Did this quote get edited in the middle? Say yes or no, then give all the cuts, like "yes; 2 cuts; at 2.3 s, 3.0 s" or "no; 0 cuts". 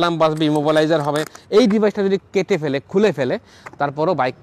yes; 1 cut; at 1.3 s